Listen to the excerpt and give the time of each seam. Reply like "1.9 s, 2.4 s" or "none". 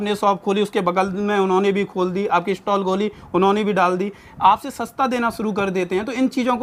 none